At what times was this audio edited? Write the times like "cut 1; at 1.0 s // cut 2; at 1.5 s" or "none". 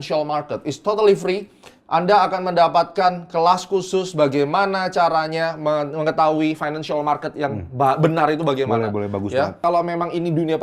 cut 1; at 9.6 s